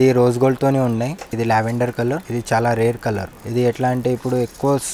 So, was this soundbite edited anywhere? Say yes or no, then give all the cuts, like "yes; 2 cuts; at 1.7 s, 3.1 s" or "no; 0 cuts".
yes; 3 cuts; at 1.3 s, 2.2 s, 3.4 s